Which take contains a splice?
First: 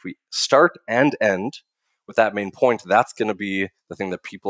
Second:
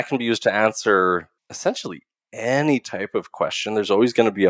second; 1 cut; at 1.4 s

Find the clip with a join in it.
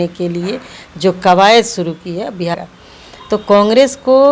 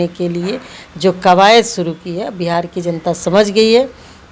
first; 1 cut; at 2.5 s

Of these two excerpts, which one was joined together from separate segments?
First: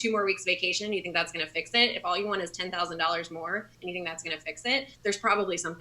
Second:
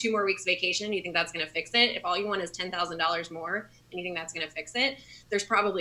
first; 2 cuts; at 3.7 s, 4.9 s

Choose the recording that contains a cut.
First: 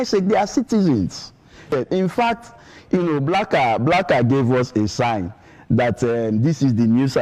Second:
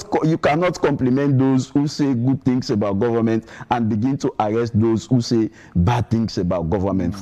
first; 1 cut; at 1.7 s

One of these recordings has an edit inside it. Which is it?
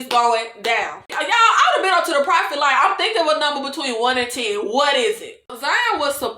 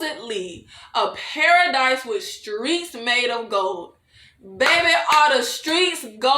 first; 2 cuts; at 1.1 s, 5.6 s

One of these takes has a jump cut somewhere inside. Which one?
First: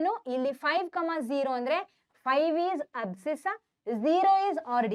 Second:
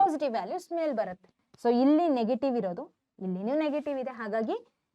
second; 1 cut; at 1.4 s

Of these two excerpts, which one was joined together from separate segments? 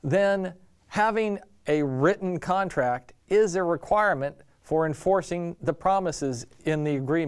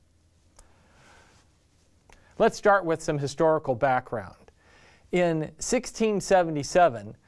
second; 1 cut; at 1.0 s

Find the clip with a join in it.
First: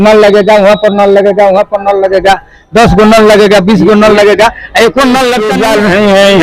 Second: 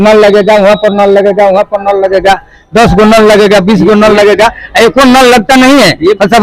first; 1 cut; at 5.5 s

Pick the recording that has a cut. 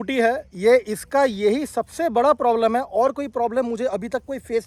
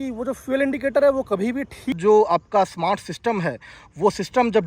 second; 1 cut; at 2.0 s

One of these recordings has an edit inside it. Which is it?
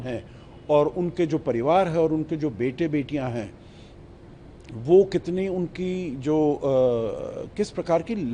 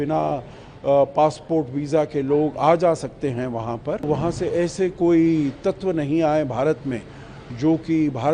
second; 1 cut; at 4.0 s

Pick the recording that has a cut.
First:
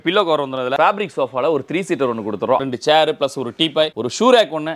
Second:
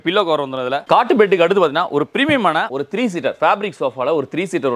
first; 2 cuts; at 0.7 s, 2.6 s

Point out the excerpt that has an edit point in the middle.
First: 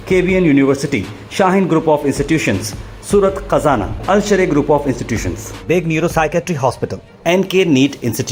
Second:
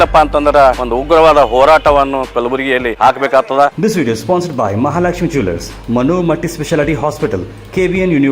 second; 3 cuts; at 0.8 s, 2.9 s, 3.8 s

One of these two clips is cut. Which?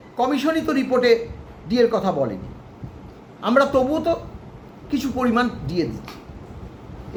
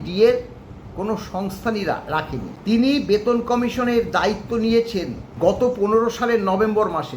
second; 2 cuts; at 2.5 s, 5.2 s

